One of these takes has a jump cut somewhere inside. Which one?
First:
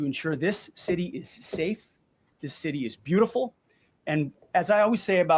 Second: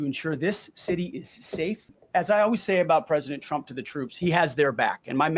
second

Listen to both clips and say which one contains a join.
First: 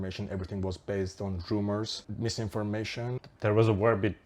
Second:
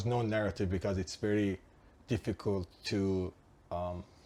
first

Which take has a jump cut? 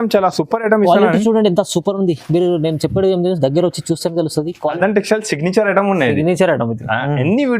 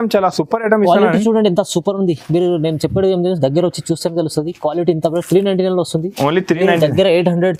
first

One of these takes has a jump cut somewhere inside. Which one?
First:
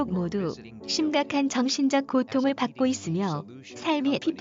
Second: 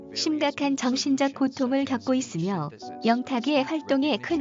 second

